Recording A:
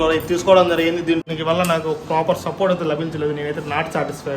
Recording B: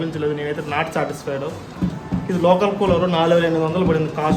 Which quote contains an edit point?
A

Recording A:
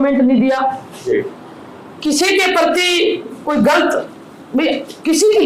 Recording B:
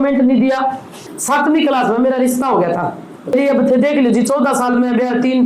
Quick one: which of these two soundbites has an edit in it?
B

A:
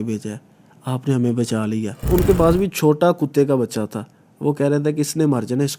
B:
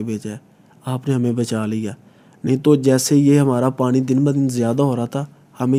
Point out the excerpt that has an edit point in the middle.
A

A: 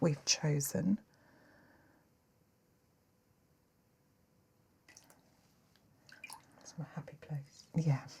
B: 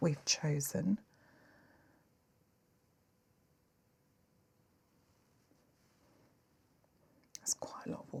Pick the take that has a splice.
A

